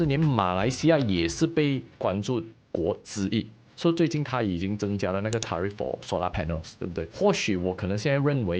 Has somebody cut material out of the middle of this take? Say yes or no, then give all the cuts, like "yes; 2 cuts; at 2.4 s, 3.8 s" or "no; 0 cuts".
yes; 2 cuts; at 3.6 s, 7.1 s